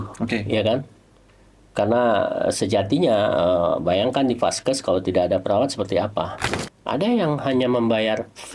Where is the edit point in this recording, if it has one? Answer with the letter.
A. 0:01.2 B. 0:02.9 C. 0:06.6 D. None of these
C